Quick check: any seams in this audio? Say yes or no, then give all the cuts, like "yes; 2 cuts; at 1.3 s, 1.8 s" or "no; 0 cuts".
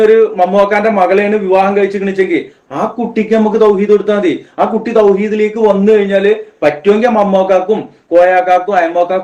no; 0 cuts